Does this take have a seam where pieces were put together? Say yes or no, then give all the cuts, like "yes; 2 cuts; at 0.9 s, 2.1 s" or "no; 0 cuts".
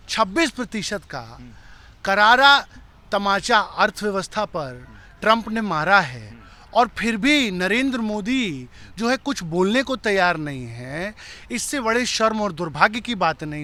no; 0 cuts